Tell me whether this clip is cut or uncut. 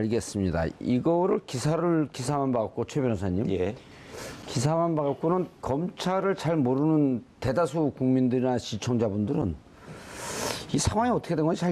cut